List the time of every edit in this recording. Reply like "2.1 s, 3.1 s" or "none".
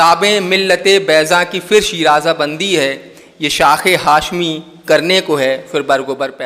none